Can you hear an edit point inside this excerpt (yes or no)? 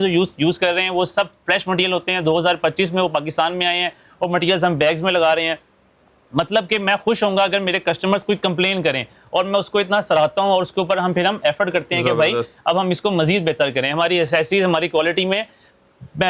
no